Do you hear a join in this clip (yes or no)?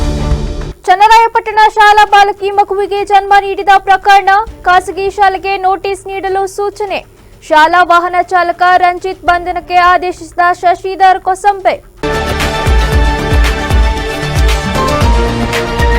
yes